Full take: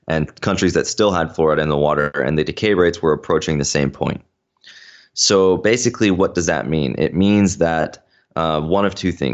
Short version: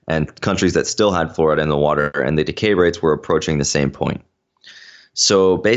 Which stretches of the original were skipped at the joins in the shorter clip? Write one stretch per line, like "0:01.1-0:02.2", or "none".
none